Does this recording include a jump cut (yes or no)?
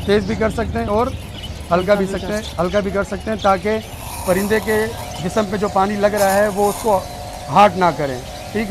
no